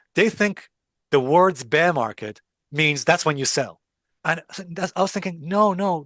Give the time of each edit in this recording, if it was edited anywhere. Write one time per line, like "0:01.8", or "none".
none